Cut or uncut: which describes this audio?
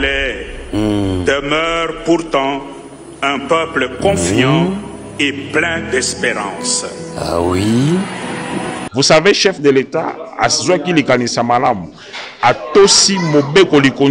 cut